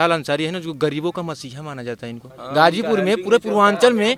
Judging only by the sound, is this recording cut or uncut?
uncut